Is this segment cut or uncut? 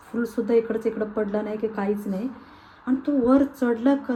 uncut